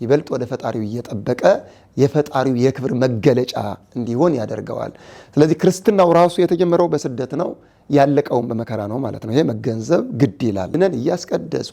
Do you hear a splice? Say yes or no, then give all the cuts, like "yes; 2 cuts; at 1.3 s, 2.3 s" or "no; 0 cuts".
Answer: yes; 1 cut; at 10.7 s